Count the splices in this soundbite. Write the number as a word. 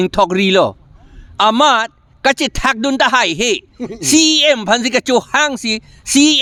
zero